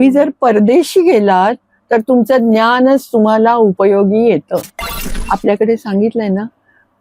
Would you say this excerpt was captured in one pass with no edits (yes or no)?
no